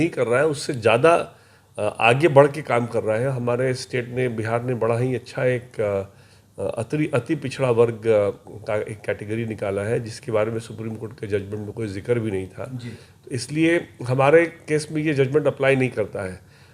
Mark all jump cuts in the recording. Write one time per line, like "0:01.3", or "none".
none

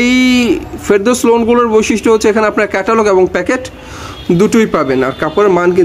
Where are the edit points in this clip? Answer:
none

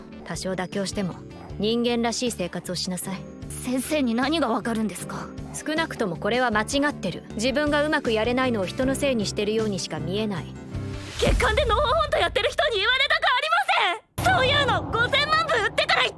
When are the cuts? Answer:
none

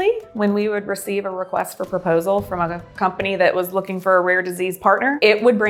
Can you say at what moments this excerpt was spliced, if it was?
none

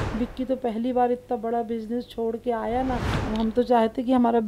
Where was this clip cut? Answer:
0:03.1

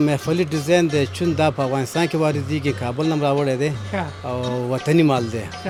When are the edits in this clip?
none

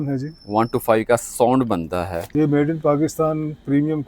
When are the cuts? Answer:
0:02.2

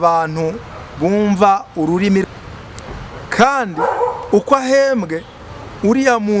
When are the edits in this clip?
0:02.3

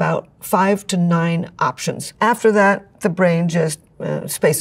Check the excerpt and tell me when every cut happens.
none

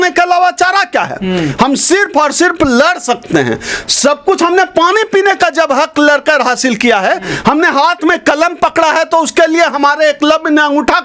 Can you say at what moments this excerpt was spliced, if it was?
none

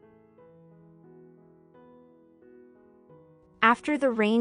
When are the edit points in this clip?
none

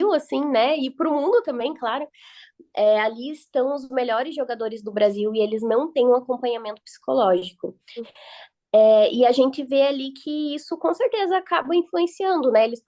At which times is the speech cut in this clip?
0:08.1

